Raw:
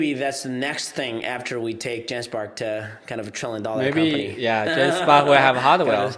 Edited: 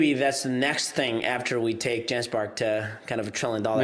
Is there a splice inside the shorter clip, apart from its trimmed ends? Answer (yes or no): no